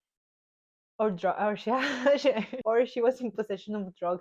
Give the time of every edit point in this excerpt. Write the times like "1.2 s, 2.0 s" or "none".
2.5 s